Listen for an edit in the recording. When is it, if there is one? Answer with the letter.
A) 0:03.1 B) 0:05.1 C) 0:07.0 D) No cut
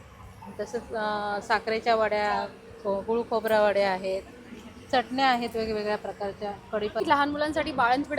C